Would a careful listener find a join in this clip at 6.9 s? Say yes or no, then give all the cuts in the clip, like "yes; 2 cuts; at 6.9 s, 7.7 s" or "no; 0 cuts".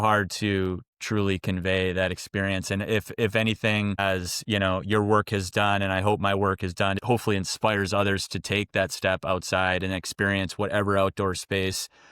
yes; 1 cut; at 6.9 s